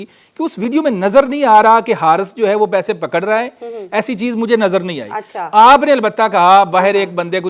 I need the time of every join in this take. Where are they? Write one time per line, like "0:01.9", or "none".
none